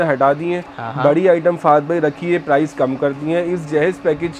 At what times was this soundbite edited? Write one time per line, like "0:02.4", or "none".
none